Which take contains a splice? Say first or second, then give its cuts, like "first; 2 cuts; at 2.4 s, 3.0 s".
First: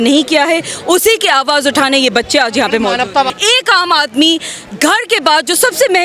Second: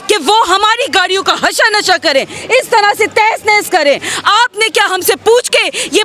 first; 1 cut; at 3.3 s